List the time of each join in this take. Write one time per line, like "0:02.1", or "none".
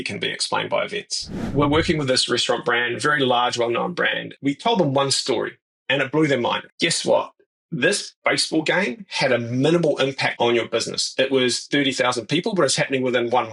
0:01.5
0:04.3
0:06.6
0:10.3